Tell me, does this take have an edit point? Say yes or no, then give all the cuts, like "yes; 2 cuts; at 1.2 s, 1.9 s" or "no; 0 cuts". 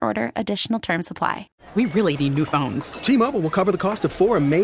yes; 1 cut; at 1.5 s